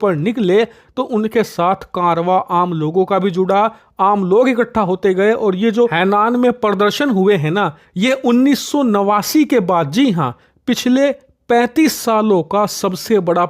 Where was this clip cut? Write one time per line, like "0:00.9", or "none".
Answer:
none